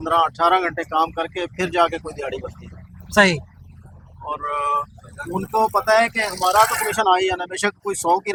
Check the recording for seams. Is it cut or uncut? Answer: uncut